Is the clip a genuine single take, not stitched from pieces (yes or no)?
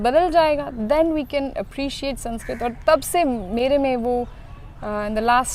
yes